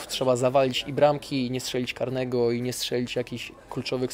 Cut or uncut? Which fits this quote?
uncut